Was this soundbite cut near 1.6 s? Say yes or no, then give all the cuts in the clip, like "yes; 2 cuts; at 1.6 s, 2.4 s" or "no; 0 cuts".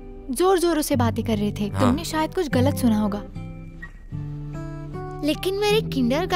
no; 0 cuts